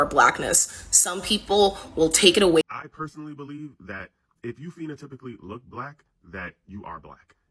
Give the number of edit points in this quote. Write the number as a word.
one